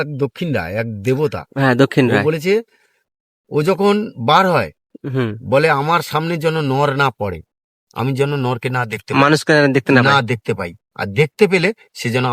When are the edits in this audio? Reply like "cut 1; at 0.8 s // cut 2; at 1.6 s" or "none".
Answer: none